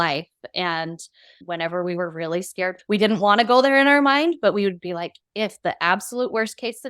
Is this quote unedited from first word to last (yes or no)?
no